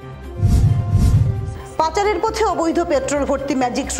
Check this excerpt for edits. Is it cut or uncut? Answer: cut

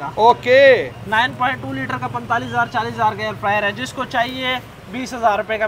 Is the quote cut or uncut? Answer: uncut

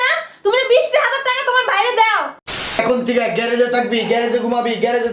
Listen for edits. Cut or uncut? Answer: cut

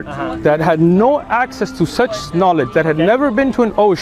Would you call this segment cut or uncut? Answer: uncut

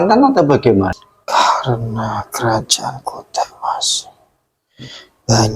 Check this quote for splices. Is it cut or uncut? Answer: cut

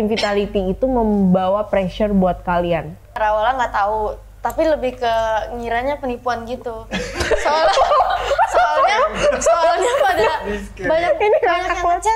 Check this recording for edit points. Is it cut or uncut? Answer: cut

